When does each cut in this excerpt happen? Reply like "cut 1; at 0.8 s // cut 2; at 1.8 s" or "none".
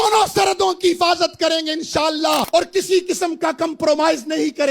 cut 1; at 2.5 s